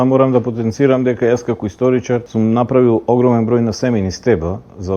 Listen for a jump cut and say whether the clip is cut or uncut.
cut